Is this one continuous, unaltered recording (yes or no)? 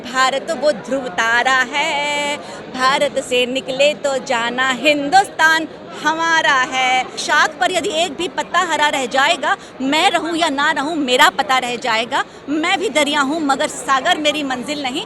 no